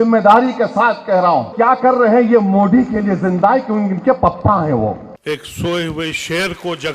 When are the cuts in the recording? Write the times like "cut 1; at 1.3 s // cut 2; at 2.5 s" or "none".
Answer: cut 1; at 1.5 s // cut 2; at 5.1 s